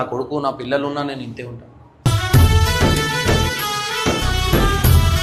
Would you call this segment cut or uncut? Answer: uncut